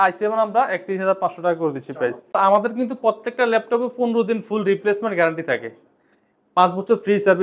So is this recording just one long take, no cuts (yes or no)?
no